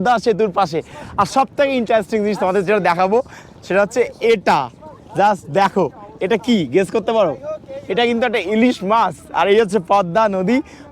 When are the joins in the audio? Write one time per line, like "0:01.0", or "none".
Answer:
none